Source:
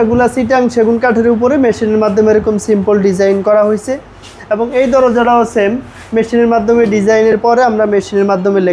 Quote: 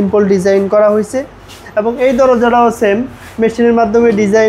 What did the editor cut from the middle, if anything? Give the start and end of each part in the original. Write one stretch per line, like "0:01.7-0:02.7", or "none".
none